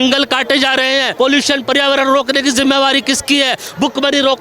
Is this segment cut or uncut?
cut